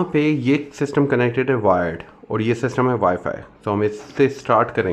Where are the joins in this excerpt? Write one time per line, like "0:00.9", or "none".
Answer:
none